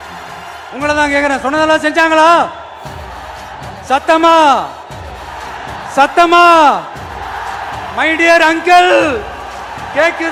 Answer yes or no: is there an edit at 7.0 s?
no